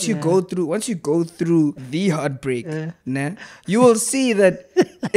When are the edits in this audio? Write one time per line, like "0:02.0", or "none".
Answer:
0:01.8